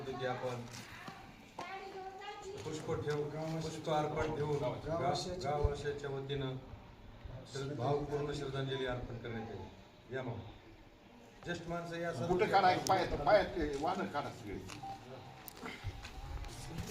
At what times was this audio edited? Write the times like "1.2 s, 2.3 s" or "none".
none

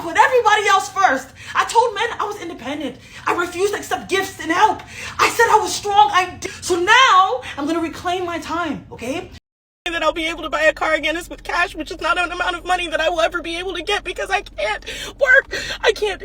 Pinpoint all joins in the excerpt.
6.4 s, 9.8 s

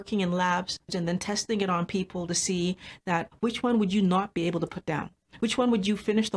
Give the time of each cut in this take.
0.9 s

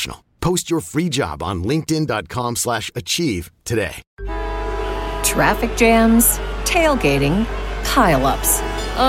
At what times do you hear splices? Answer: 4.1 s

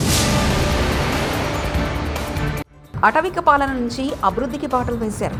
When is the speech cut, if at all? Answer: none

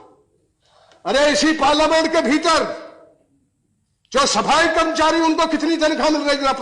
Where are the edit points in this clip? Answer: none

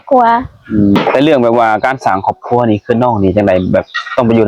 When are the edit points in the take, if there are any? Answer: 1.0 s

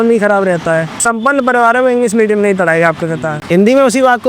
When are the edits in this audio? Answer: 1.0 s, 3.3 s

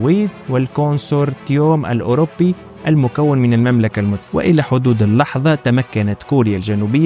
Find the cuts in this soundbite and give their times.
4.2 s

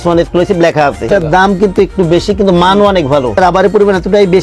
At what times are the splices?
1.1 s, 3.4 s

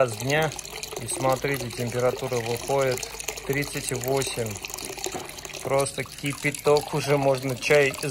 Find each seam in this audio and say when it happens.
none

